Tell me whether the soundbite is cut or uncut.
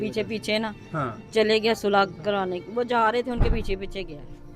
uncut